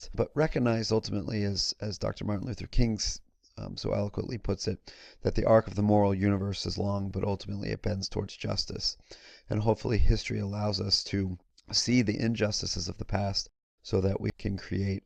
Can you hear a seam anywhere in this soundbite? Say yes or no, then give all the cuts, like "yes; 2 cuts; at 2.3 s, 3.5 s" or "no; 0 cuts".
no; 0 cuts